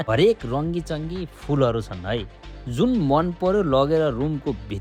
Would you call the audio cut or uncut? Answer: uncut